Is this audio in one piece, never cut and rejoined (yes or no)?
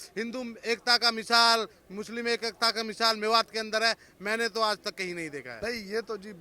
no